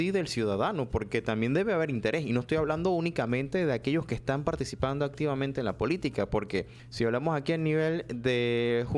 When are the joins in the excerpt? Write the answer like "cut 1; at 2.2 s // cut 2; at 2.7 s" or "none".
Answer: cut 1; at 6.8 s